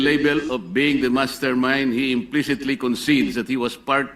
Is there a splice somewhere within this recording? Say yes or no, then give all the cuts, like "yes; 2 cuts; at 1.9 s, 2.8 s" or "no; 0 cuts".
no; 0 cuts